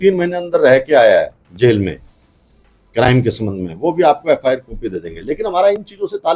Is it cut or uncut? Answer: uncut